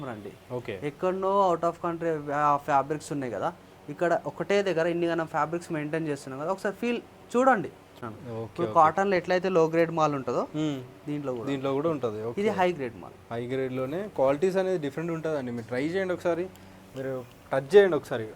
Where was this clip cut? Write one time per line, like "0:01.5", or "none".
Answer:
0:07.9